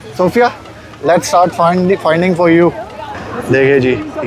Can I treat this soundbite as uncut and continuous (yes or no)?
no